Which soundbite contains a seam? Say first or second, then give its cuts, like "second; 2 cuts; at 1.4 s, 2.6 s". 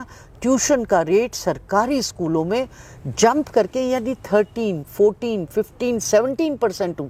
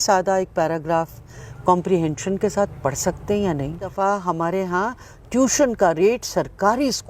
second; 1 cut; at 3.9 s